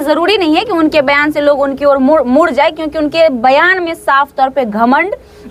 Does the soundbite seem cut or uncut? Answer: uncut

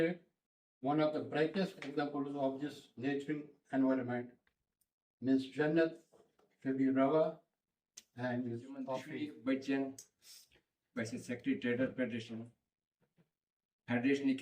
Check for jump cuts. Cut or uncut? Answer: cut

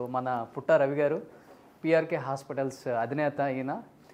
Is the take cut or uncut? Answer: uncut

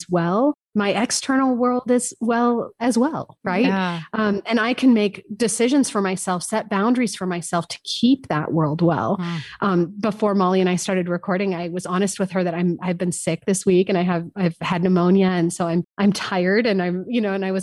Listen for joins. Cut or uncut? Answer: uncut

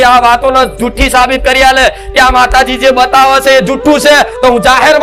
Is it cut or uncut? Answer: uncut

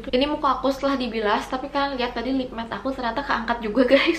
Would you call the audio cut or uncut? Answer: uncut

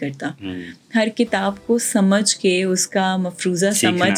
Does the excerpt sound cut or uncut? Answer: uncut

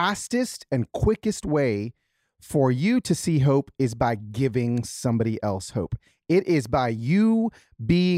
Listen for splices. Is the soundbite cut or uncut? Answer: uncut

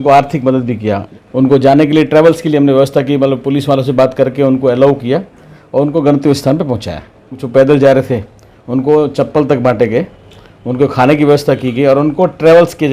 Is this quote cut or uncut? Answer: cut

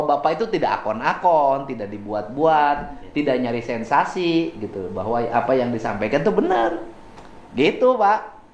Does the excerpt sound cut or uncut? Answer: uncut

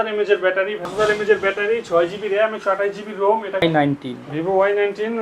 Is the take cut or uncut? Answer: cut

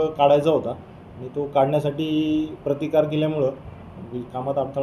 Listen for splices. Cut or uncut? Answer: uncut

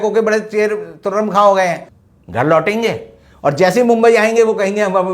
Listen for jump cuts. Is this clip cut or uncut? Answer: cut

